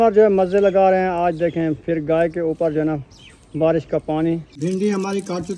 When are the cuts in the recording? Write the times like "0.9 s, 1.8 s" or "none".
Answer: 4.5 s